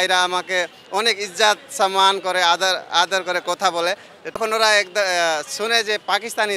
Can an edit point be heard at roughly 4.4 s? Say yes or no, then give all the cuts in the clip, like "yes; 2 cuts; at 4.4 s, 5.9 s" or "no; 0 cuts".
yes; 1 cut; at 4.4 s